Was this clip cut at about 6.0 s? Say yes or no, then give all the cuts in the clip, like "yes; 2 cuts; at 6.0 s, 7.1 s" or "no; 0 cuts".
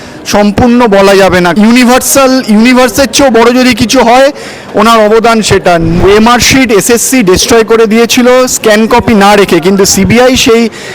yes; 2 cuts; at 1.5 s, 6.0 s